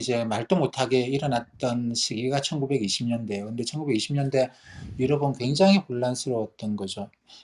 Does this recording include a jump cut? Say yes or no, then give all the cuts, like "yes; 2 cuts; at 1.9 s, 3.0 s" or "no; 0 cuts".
no; 0 cuts